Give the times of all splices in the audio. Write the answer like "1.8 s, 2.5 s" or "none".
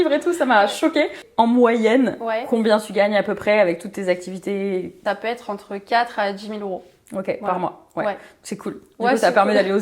1.2 s, 5.0 s